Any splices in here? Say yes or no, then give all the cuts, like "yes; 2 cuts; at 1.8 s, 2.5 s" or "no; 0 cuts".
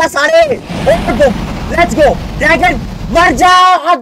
no; 0 cuts